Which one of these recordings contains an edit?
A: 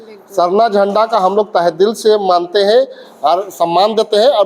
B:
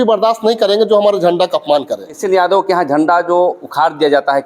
B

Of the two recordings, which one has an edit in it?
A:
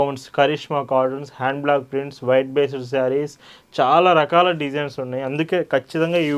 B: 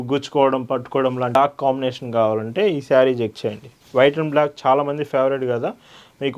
B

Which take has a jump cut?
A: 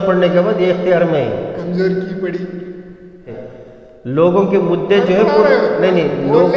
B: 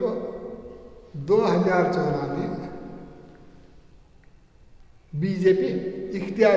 A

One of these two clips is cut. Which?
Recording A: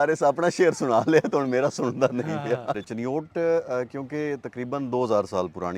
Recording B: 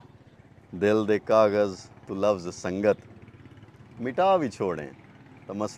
A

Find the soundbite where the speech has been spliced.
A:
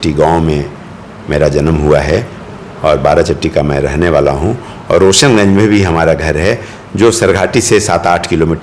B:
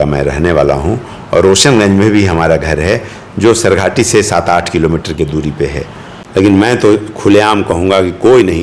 B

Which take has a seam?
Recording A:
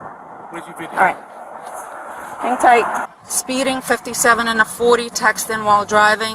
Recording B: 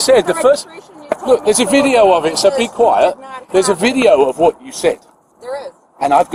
A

